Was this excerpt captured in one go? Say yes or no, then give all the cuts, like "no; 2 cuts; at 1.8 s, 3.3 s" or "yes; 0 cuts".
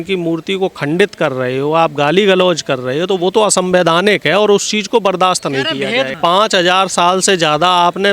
no; 1 cut; at 6.1 s